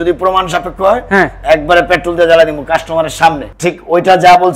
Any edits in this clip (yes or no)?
no